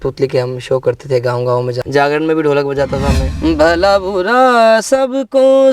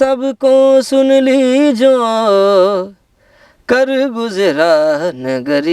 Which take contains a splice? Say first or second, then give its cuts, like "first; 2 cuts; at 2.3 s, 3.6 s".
first; 2 cuts; at 1.8 s, 3.2 s